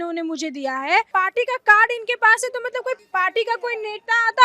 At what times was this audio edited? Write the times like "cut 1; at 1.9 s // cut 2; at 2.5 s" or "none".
cut 1; at 1.1 s // cut 2; at 3.0 s